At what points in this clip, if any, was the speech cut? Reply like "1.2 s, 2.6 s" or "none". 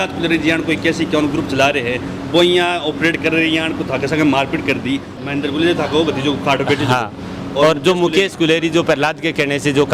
5.1 s